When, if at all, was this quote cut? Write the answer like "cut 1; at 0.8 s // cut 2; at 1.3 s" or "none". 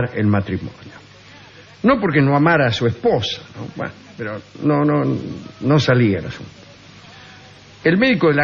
cut 1; at 7.0 s